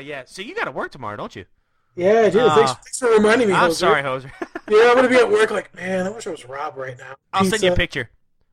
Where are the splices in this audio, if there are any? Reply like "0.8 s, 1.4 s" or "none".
none